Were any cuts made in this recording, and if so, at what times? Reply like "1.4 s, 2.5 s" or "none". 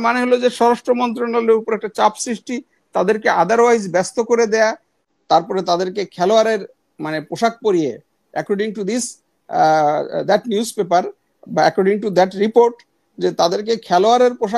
5.1 s